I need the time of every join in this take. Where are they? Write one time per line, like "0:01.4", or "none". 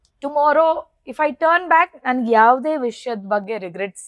none